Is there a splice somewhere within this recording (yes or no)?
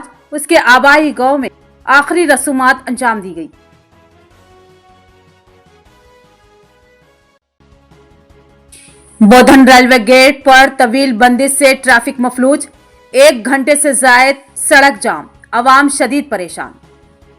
yes